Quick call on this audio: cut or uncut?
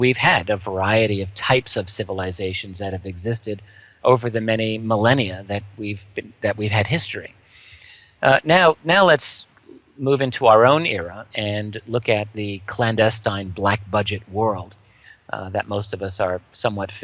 uncut